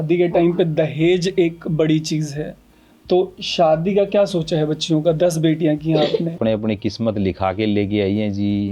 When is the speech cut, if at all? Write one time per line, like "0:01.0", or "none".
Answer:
0:06.4